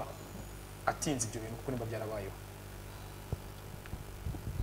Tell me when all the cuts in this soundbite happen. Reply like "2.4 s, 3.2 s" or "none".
none